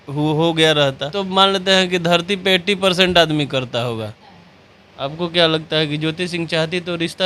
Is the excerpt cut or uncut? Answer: cut